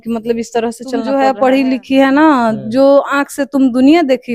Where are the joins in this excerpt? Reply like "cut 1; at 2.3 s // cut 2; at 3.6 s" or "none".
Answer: cut 1; at 1.1 s